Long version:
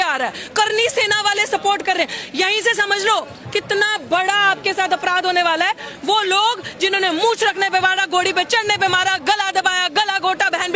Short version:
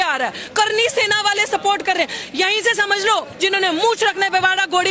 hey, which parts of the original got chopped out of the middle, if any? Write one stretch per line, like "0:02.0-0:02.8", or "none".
0:03.3-0:06.7